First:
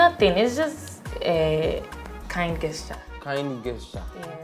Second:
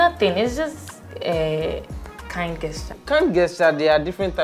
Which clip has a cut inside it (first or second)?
second